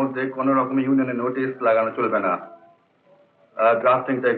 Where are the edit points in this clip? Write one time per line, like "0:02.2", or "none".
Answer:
none